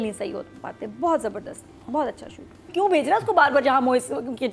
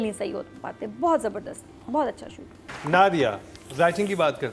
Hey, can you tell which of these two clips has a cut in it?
first; 1 cut; at 2.7 s

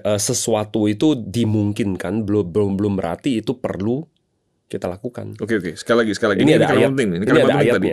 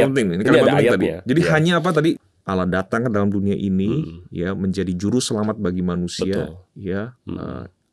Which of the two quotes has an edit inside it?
second; 1 cut; at 2.2 s

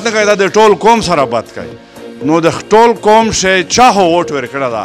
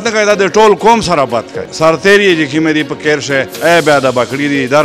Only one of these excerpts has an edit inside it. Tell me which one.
second; 1 cut; at 1.7 s

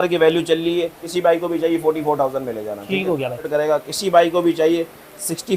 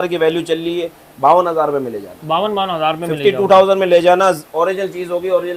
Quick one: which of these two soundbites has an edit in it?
first; 2 cuts; at 1.0 s, 3.5 s

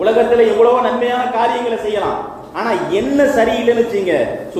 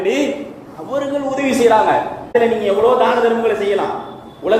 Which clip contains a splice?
second; 1 cut; at 2.2 s

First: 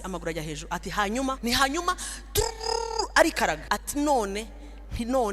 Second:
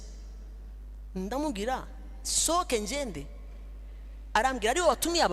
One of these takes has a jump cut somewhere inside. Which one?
first; 2 cuts; at 1.4 s, 3.6 s

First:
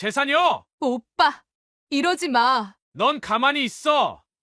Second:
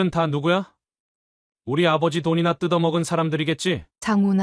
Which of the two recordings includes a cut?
first; 1 cut; at 2.8 s

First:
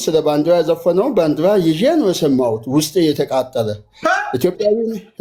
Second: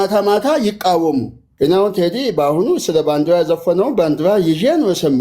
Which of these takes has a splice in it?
second; 1 cut; at 1.4 s

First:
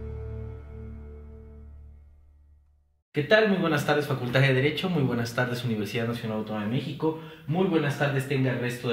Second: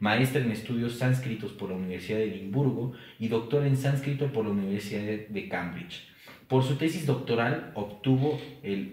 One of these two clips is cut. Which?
second; 1 cut; at 7.1 s

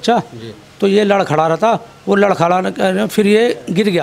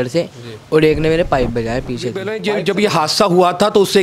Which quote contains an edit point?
second; 1 cut; at 2.3 s

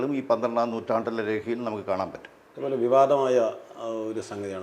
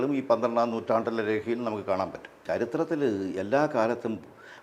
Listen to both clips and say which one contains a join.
second; 1 cut; at 2.4 s

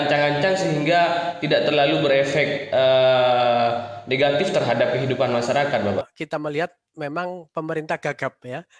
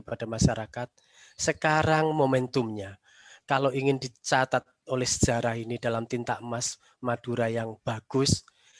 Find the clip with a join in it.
first; 1 cut; at 6.1 s

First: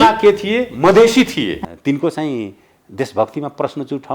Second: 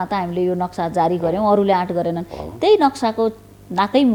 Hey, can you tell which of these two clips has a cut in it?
first; 1 cut; at 1.6 s

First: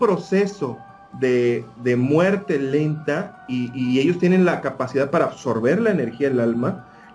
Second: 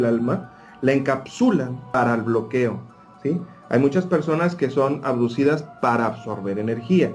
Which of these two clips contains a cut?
second; 1 cut; at 1.8 s

